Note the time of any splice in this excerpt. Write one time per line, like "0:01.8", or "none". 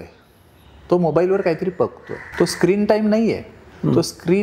0:02.2